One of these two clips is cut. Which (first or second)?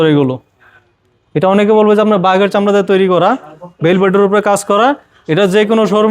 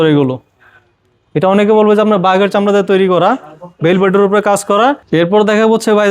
second